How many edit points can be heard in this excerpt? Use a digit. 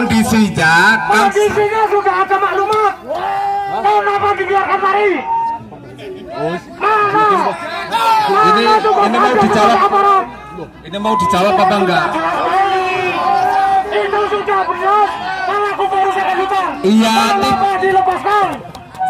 0